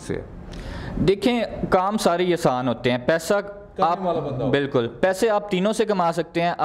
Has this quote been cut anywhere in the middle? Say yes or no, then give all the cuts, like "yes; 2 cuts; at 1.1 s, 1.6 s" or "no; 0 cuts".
no; 0 cuts